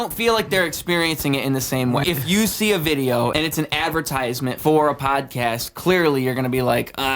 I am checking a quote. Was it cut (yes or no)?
yes